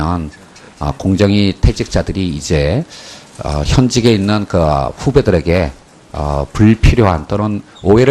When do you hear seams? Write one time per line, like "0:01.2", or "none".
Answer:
0:04.1